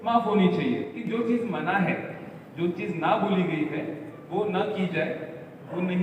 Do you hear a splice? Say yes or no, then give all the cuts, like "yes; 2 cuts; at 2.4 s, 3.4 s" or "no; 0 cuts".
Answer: yes; 1 cut; at 1.0 s